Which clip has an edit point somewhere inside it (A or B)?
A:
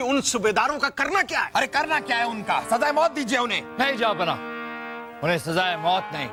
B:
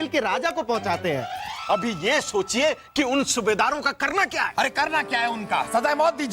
B